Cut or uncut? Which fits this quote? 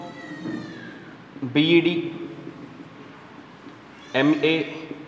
uncut